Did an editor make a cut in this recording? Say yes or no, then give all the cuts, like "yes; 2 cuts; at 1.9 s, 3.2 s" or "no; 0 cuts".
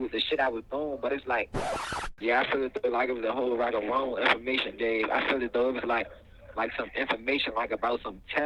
yes; 1 cut; at 1.8 s